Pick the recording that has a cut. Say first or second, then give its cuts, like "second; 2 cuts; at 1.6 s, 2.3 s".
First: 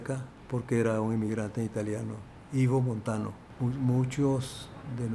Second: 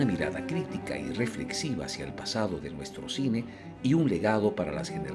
first; 2 cuts; at 1.3 s, 3.4 s